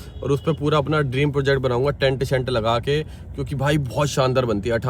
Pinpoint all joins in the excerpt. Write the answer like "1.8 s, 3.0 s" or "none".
none